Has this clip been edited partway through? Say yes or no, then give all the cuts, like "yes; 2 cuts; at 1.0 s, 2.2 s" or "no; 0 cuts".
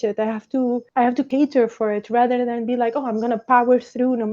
yes; 1 cut; at 1.3 s